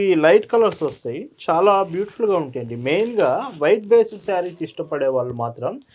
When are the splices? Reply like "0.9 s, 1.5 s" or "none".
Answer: none